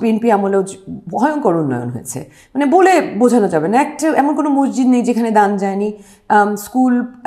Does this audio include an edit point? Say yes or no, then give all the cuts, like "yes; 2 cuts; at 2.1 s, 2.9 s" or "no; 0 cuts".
no; 0 cuts